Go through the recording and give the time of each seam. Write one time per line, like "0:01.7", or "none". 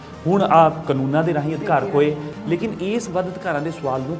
0:02.3